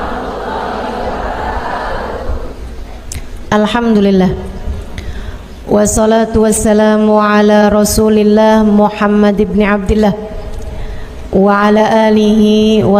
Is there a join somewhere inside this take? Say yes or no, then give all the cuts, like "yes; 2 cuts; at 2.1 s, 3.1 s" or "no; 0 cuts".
no; 0 cuts